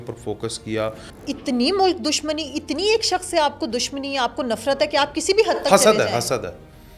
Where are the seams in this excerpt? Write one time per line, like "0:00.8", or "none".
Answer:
0:01.1